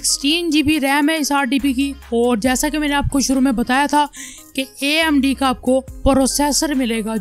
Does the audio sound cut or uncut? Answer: uncut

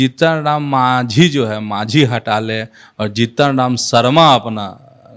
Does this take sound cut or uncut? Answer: uncut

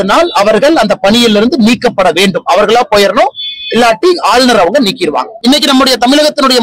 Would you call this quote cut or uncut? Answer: cut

